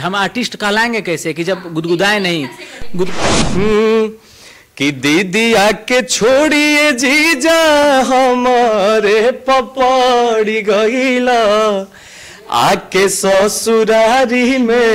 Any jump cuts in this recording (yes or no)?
yes